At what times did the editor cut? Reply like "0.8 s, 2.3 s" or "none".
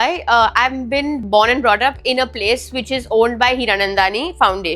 1.2 s